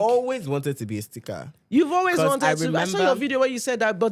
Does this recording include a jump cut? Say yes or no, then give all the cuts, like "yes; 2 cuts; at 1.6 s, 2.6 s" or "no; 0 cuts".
no; 0 cuts